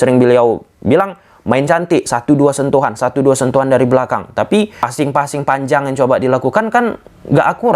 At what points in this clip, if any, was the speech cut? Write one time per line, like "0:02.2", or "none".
none